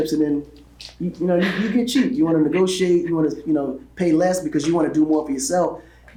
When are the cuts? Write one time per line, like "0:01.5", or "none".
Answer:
none

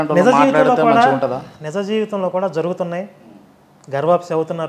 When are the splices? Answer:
none

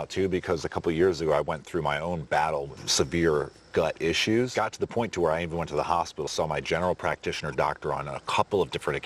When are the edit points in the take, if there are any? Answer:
0:02.8
0:04.5
0:06.3

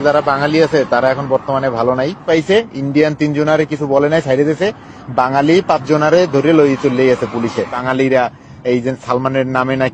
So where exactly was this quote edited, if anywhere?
0:02.2
0:07.8

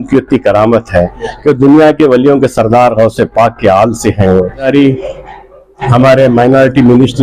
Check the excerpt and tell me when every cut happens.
0:04.7

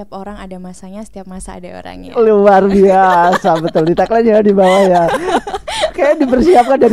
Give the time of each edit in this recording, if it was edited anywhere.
none

